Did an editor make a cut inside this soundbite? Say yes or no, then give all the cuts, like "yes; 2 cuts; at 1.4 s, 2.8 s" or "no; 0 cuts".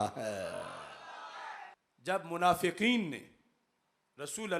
yes; 1 cut; at 1.8 s